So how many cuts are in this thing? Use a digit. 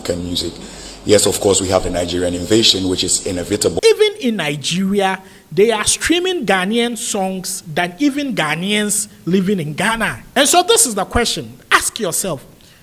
2